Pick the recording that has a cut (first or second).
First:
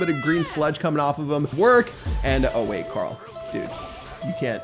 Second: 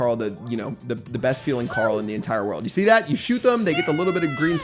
first